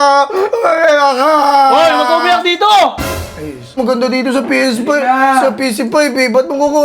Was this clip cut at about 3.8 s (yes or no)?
yes